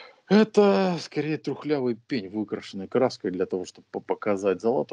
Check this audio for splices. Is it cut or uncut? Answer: uncut